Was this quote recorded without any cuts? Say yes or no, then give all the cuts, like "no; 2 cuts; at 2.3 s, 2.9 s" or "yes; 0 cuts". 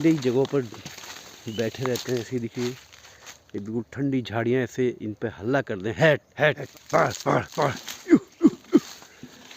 no; 1 cut; at 6.7 s